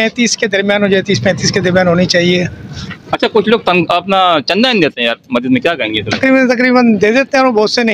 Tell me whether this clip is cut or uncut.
uncut